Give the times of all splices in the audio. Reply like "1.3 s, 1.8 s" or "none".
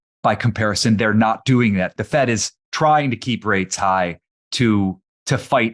1.9 s, 4.5 s